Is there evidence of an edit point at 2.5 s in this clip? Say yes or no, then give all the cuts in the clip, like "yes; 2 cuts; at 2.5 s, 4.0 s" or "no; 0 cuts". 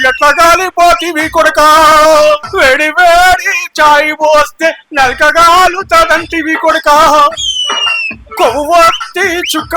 yes; 1 cut; at 2.5 s